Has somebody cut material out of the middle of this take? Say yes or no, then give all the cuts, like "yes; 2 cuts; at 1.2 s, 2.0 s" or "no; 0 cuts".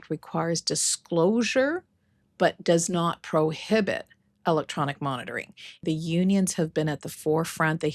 yes; 1 cut; at 5.8 s